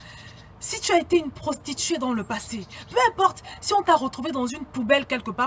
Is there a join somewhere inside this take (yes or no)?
no